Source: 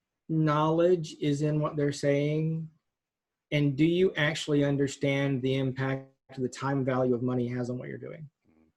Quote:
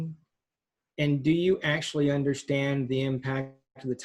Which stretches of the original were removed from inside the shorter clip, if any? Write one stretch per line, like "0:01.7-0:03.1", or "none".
none